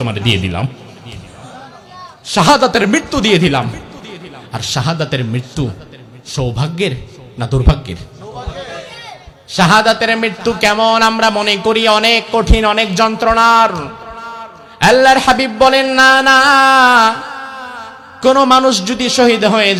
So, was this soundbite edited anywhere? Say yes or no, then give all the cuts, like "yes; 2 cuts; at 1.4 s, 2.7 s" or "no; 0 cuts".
no; 0 cuts